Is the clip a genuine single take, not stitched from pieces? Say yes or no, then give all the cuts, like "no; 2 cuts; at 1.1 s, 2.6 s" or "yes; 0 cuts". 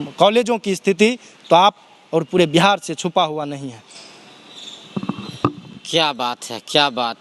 yes; 0 cuts